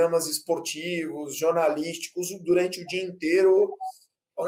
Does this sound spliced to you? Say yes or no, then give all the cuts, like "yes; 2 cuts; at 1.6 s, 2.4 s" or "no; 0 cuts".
no; 0 cuts